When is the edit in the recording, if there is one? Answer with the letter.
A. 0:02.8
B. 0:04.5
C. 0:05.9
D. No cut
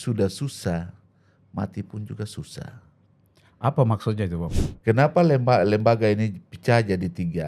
B